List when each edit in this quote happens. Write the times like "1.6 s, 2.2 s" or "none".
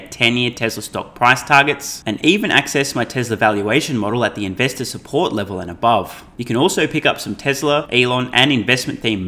6.3 s, 7.9 s